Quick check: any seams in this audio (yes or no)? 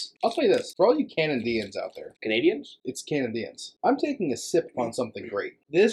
no